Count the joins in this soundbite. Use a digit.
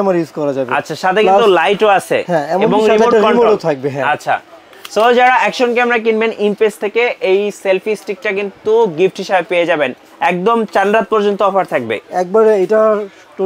0